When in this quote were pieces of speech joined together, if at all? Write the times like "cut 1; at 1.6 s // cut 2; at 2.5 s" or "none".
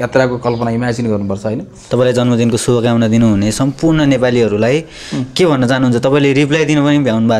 cut 1; at 1.8 s